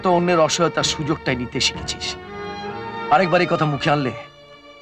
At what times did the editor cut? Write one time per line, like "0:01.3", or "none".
none